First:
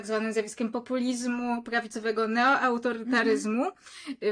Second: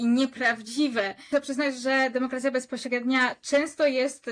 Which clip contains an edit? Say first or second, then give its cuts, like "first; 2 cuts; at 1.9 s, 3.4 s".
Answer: second; 1 cut; at 1.3 s